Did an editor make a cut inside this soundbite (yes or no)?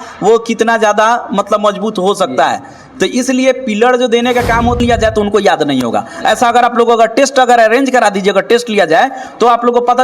yes